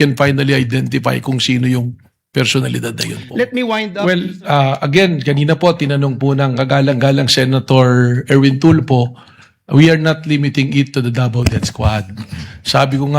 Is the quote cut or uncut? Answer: cut